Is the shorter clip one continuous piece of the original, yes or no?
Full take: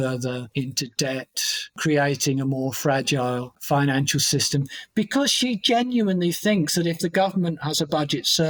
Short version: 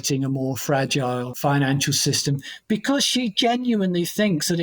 no